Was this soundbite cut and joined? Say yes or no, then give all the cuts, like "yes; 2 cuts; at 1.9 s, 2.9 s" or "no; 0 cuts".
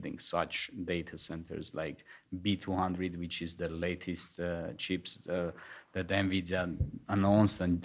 no; 0 cuts